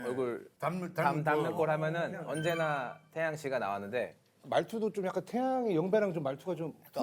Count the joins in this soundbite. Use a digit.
0